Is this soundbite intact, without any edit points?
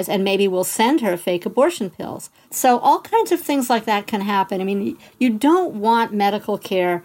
no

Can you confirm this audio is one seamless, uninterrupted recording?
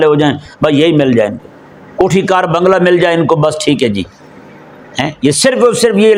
yes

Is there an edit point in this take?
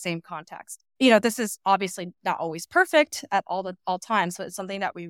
no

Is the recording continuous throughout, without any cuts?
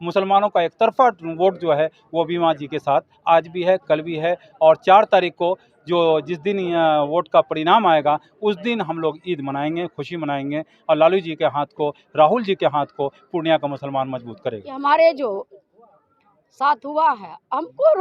no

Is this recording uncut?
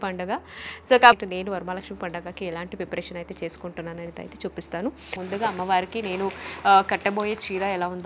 no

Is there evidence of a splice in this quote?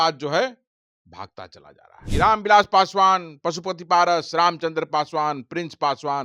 yes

